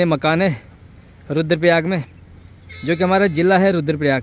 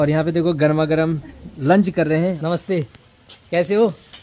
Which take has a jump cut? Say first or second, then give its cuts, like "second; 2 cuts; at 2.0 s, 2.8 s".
second; 1 cut; at 2.4 s